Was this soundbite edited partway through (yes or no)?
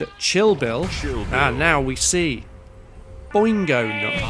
yes